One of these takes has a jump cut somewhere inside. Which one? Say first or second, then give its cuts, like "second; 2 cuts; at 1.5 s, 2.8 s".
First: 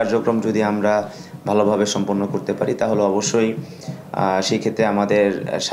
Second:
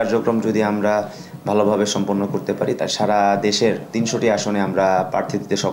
second; 1 cut; at 2.8 s